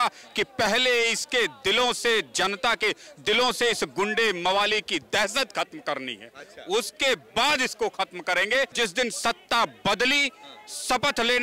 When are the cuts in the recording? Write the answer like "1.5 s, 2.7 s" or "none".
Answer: 8.7 s